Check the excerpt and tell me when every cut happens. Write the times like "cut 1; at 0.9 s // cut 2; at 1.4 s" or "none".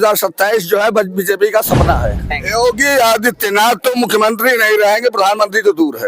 cut 1; at 2.4 s